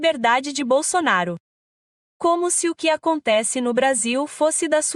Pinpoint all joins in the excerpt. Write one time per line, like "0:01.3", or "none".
none